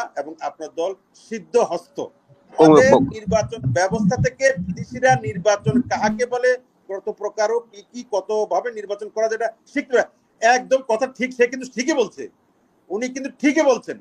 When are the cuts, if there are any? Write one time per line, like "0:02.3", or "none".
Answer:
0:02.5